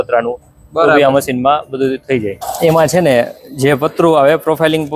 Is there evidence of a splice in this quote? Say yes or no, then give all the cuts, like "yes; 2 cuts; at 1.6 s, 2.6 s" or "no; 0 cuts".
yes; 1 cut; at 2.4 s